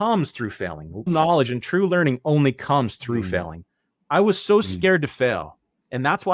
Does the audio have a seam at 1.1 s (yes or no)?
yes